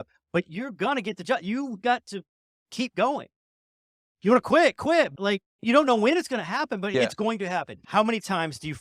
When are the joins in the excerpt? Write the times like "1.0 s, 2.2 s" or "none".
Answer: 7.8 s

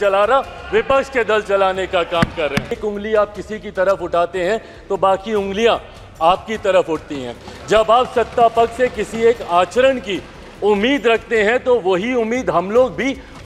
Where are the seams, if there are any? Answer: 2.8 s

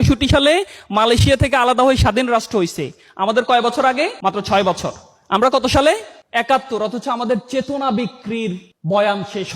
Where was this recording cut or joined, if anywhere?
4.1 s, 6.2 s

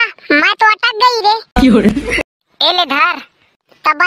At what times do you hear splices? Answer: 1.9 s

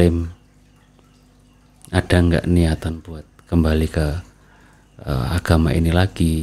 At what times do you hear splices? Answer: none

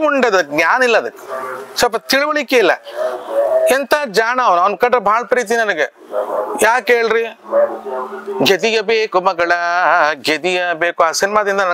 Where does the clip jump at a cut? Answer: none

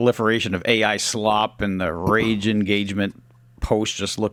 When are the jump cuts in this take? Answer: none

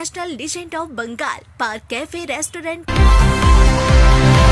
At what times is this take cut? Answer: 2.9 s

